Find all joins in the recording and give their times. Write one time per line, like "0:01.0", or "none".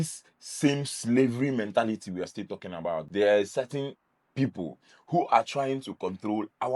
0:03.1